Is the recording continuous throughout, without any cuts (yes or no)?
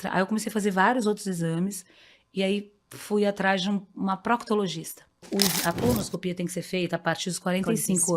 no